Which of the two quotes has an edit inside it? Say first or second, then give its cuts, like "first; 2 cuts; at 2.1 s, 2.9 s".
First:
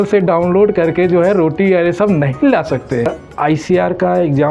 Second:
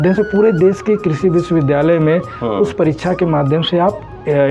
first; 1 cut; at 3.1 s